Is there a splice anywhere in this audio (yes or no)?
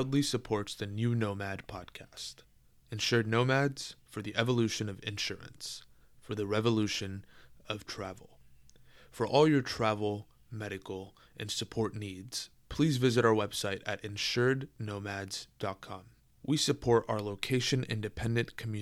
no